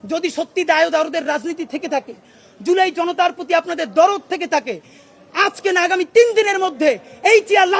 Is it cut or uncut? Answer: uncut